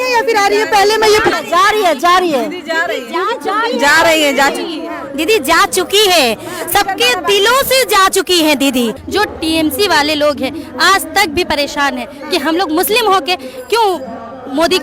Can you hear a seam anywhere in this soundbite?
yes; 2 cuts; at 1.3 s, 9.0 s

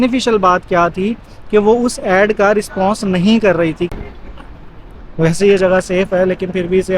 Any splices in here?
yes; 1 cut; at 4.0 s

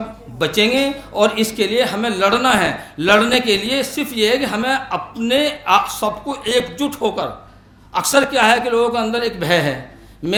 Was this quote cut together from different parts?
no; 0 cuts

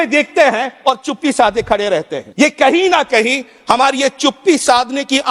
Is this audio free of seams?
no; 1 cut; at 2.2 s

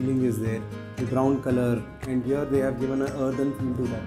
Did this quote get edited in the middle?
yes; 1 cut; at 2.2 s

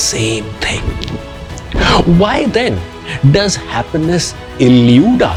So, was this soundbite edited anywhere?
no; 0 cuts

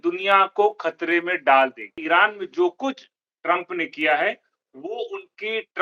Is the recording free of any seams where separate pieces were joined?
no; 1 cut; at 2.0 s

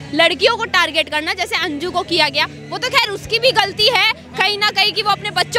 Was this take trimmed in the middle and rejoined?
no; 0 cuts

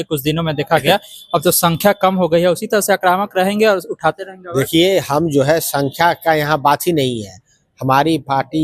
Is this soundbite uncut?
yes; 0 cuts

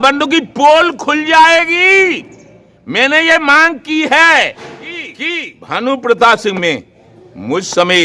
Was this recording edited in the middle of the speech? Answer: yes; 1 cut; at 5.2 s

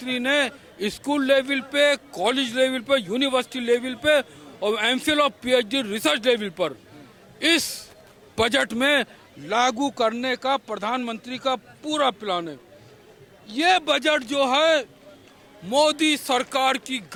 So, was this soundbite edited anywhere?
no; 0 cuts

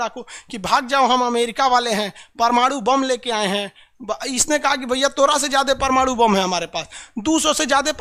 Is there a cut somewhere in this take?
no; 0 cuts

